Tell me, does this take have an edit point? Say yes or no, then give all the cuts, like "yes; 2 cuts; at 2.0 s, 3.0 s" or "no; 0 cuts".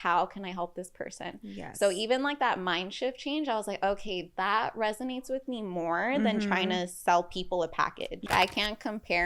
yes; 1 cut; at 8.3 s